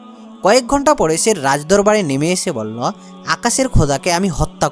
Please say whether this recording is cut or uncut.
uncut